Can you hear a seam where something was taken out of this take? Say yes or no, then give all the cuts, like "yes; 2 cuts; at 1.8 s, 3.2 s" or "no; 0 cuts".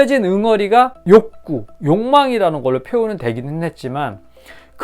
yes; 1 cut; at 1.0 s